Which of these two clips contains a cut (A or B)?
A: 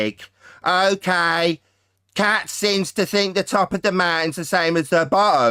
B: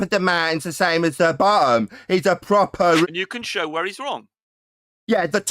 B